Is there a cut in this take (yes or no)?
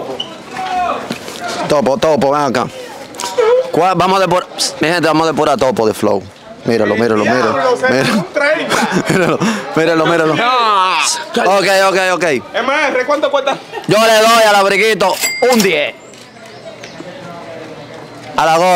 no